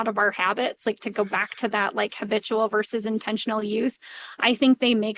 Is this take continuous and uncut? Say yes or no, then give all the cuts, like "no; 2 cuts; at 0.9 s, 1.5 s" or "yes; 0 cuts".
yes; 0 cuts